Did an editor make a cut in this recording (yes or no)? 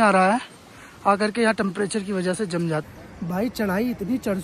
yes